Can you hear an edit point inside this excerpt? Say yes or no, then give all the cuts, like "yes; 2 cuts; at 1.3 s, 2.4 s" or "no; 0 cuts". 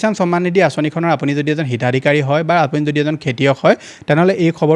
no; 0 cuts